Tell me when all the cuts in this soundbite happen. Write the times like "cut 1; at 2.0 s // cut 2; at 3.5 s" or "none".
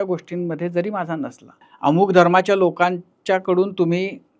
cut 1; at 1.7 s